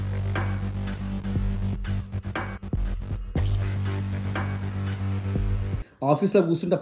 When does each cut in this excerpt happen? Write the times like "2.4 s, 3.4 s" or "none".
5.9 s